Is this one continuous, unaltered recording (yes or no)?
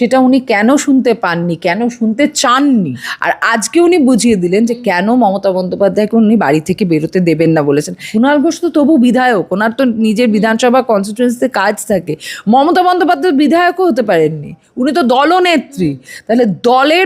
no